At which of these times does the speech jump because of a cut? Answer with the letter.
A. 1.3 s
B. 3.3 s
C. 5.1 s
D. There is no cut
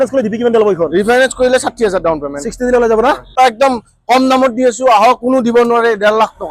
B